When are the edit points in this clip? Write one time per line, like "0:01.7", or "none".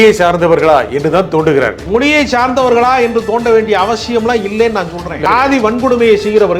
0:01.8
0:05.3